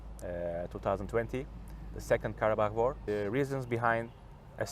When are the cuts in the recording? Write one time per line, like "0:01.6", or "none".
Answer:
0:03.0

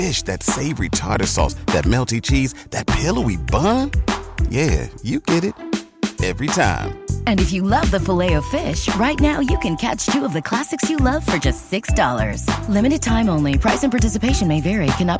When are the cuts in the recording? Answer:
none

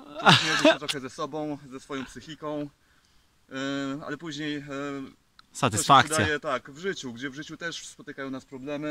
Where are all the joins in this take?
none

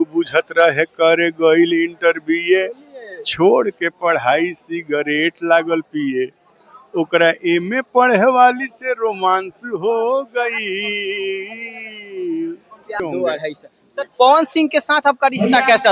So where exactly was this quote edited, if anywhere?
0:13.0

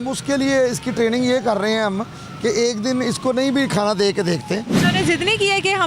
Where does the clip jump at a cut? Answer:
0:04.7

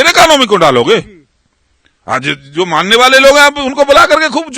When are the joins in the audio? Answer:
none

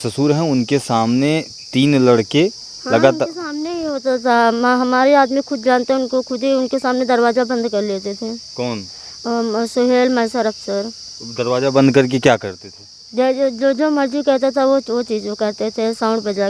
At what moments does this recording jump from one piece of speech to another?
none

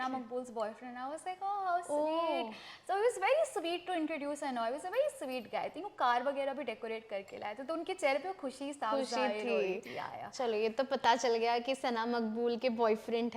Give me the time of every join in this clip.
none

